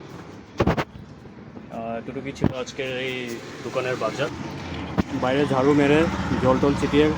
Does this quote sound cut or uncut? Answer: cut